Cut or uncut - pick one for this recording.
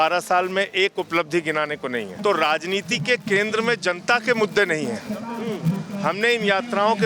cut